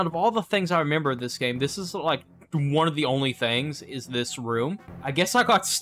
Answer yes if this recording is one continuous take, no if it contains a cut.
no